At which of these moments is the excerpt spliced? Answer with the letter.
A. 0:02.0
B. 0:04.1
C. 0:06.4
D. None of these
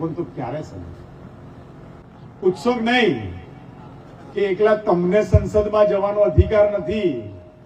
A